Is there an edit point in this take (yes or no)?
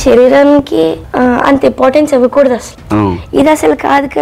yes